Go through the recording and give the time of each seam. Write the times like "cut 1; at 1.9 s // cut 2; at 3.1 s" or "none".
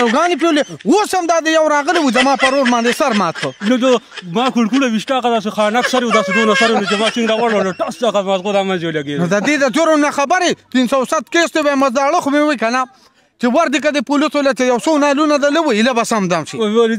none